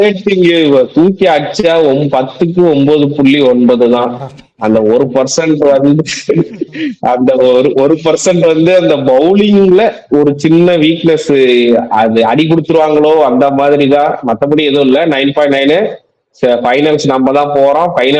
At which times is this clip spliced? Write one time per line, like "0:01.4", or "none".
none